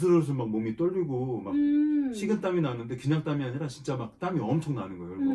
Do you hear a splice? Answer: no; 0 cuts

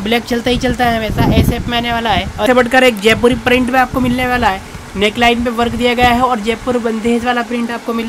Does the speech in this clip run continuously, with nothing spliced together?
no; 1 cut; at 2.5 s

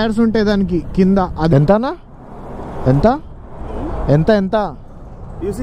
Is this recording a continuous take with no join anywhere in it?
no; 1 cut; at 1.5 s

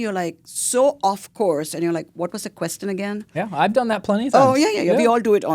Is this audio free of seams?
yes; 0 cuts

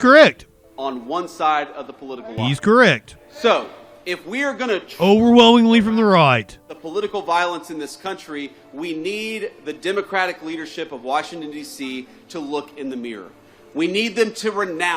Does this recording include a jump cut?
no; 0 cuts

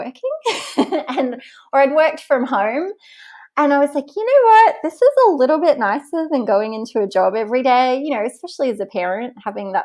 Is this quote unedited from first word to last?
yes; 0 cuts

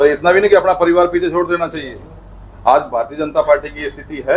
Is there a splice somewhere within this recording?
no; 0 cuts

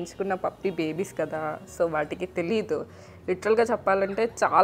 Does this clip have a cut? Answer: no; 0 cuts

